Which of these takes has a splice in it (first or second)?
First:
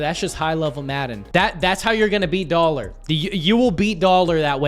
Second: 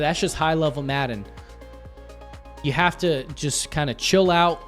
first